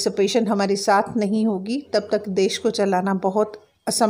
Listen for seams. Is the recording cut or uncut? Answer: uncut